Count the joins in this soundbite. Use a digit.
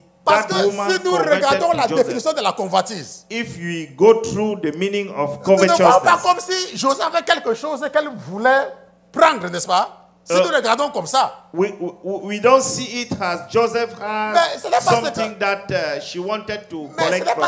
0